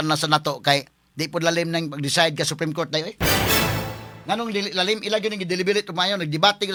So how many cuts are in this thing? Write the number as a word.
zero